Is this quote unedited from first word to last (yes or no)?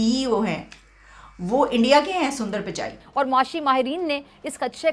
no